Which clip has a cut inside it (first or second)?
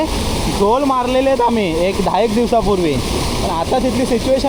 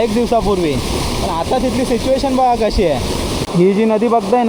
second